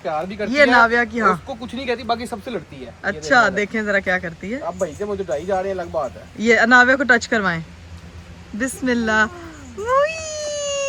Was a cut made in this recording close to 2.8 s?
no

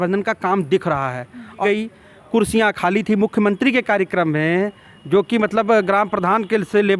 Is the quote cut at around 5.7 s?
no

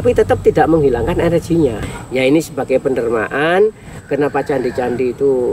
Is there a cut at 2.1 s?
yes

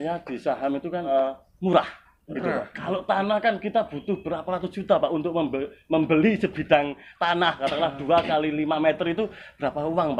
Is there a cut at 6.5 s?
no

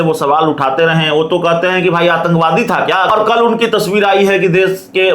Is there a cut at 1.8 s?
no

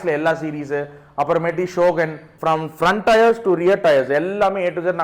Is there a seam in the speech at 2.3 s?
yes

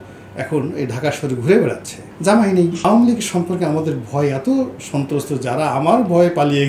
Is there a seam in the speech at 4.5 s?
no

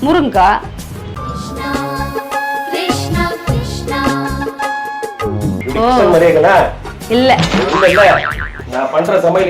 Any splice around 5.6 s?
no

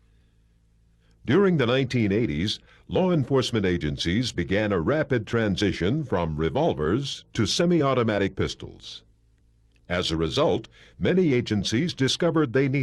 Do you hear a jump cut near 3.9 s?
no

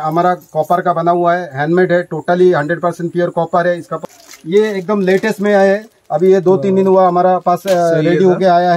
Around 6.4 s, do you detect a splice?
no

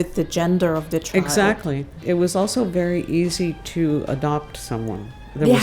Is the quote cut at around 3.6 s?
no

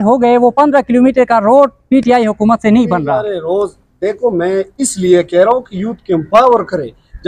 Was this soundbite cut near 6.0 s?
no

